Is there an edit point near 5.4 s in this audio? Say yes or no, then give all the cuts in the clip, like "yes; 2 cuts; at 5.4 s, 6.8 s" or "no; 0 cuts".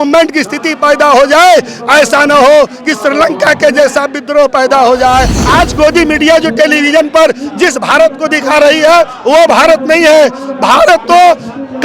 yes; 1 cut; at 5.4 s